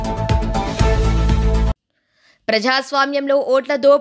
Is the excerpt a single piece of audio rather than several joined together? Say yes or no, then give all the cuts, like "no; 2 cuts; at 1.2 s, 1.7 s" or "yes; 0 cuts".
no; 1 cut; at 1.7 s